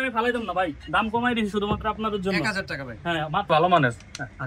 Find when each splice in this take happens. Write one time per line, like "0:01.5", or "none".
0:03.5